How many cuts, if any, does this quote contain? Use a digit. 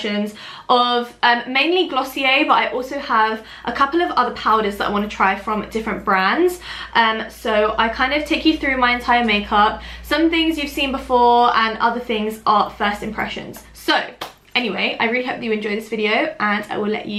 0